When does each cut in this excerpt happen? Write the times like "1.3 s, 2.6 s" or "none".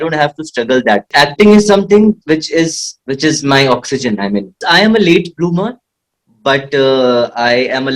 1.1 s, 4.6 s